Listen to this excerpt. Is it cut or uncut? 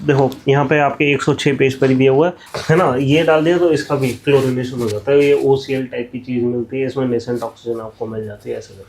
cut